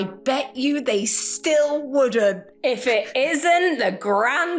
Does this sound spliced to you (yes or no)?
no